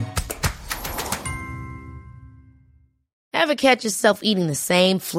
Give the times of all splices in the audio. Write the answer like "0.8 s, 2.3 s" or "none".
3.1 s